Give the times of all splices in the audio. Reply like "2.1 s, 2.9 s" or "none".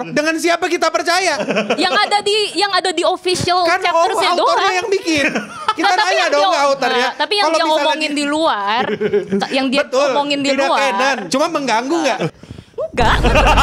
11.2 s, 12.3 s